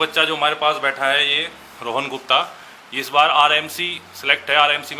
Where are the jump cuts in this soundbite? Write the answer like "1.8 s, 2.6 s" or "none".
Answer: none